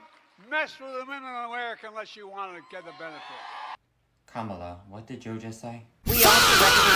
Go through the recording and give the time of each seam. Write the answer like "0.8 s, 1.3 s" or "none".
none